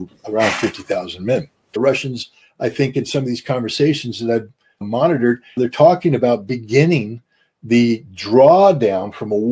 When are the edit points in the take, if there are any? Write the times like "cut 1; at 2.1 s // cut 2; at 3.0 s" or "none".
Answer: cut 1; at 1.7 s